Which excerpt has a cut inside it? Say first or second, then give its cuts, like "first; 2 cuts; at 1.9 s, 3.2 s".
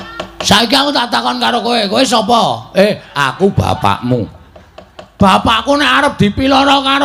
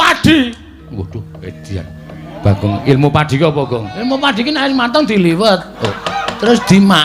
second; 1 cut; at 5.7 s